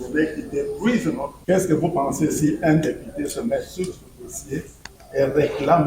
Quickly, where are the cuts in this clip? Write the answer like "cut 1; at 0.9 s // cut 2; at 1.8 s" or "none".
cut 1; at 1.3 s